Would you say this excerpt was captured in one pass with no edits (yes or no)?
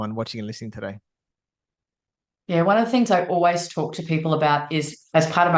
yes